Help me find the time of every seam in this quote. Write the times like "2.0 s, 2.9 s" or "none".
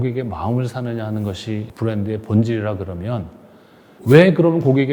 1.7 s

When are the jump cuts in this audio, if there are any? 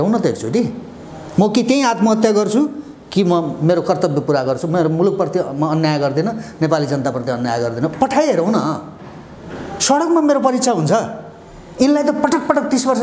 none

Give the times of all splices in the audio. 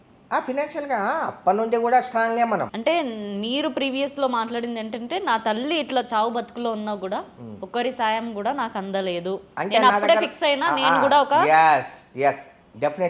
2.7 s

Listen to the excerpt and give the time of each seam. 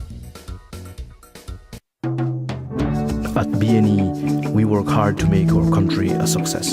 1.8 s

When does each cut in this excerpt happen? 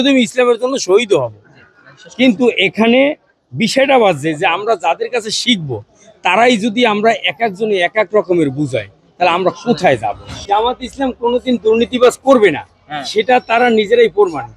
10.4 s

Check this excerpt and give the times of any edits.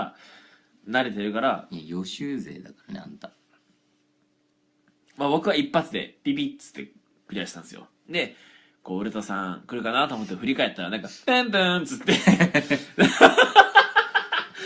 none

